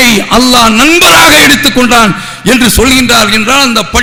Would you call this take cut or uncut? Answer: uncut